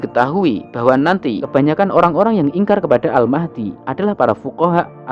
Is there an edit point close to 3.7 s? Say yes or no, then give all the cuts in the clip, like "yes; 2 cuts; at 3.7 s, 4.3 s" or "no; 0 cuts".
no; 1 cut; at 1.4 s